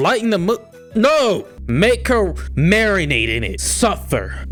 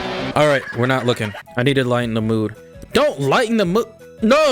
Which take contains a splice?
second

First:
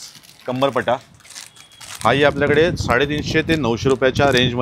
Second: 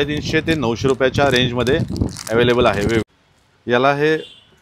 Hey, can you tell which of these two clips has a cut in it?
second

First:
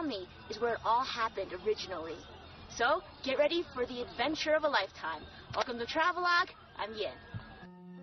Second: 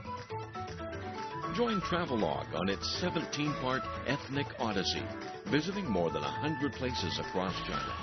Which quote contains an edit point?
second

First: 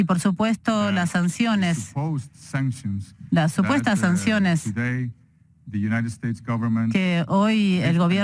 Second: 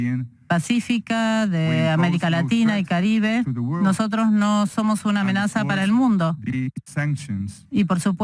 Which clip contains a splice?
second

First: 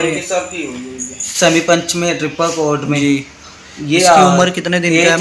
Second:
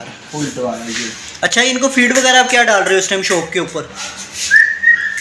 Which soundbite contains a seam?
first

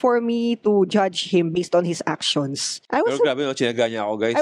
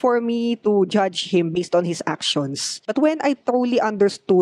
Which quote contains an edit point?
second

